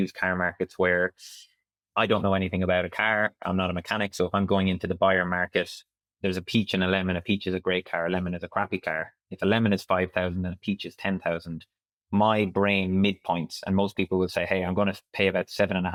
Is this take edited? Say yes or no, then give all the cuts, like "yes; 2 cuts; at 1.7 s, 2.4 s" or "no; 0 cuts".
no; 0 cuts